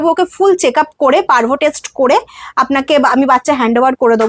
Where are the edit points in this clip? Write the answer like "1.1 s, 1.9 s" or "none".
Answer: none